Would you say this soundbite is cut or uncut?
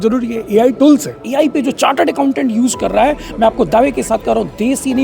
cut